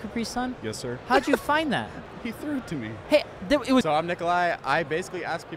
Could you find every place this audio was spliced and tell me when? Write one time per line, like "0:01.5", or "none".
0:02.5
0:03.8